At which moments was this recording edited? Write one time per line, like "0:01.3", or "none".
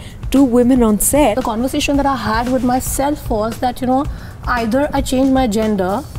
0:01.4